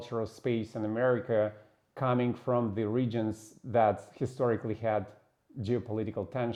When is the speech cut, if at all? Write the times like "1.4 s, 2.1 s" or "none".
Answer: none